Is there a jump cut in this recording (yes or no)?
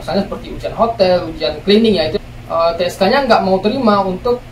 yes